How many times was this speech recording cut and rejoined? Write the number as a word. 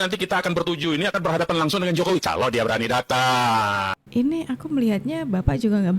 one